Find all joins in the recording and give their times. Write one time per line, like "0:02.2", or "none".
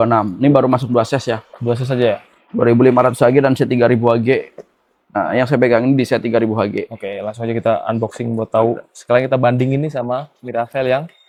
none